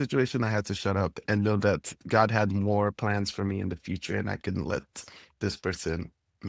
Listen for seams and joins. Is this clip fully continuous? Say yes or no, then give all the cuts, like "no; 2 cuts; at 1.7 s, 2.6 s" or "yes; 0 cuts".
yes; 0 cuts